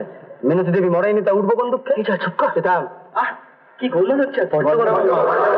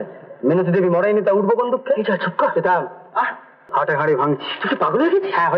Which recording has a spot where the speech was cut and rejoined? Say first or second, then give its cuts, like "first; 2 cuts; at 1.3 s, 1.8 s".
second; 1 cut; at 3.6 s